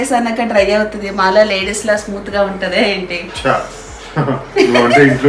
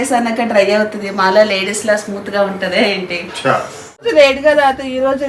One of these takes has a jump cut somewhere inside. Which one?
second; 1 cut; at 4.1 s

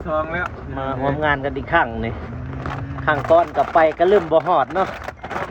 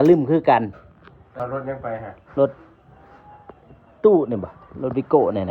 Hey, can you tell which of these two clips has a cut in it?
second; 1 cut; at 1.3 s

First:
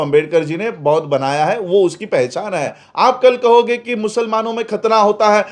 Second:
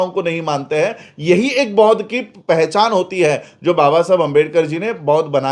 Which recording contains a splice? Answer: first; 1 cut; at 2.8 s

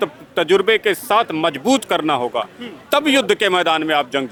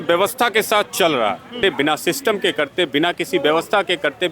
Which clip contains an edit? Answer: second; 1 cut; at 1.6 s

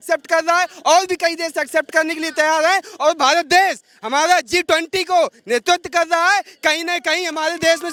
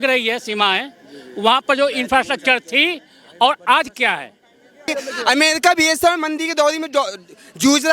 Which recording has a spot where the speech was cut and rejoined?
second; 1 cut; at 4.9 s

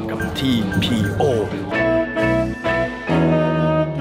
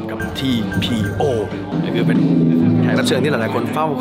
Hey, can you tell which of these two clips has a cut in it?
first; 1 cut; at 1.6 s

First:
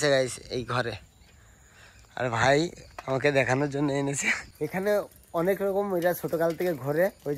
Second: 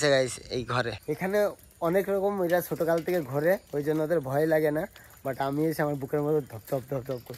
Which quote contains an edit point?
second; 1 cut; at 1.0 s

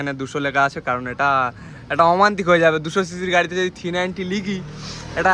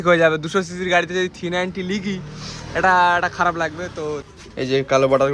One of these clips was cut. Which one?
second; 1 cut; at 4.3 s

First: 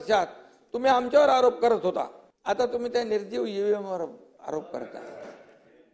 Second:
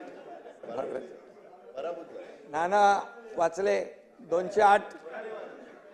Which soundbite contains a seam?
first; 1 cut; at 2.2 s

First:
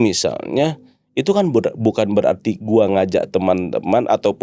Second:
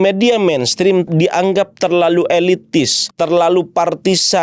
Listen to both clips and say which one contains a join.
second; 2 cuts; at 1.1 s, 3.0 s

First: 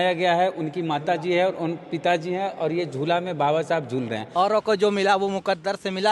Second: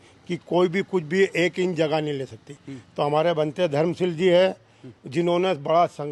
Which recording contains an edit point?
first; 1 cut; at 4.2 s

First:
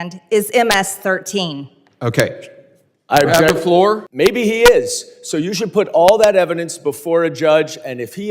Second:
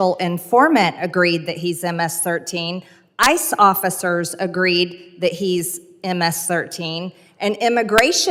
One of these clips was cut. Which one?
first; 1 cut; at 4.1 s

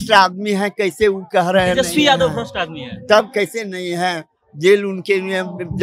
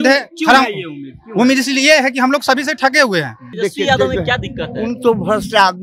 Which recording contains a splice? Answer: second; 1 cut; at 3.4 s

